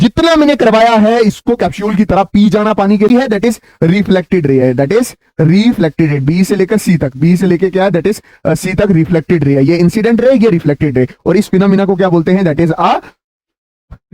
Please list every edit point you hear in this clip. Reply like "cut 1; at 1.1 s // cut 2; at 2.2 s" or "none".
cut 1; at 3.1 s